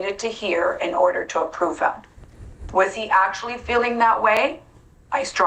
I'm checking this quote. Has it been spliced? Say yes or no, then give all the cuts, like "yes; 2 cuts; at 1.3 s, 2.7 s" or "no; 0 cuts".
no; 0 cuts